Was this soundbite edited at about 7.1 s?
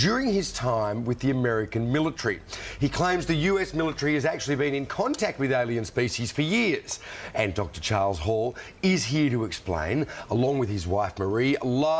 no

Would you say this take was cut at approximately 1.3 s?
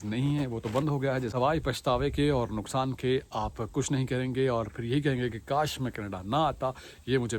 yes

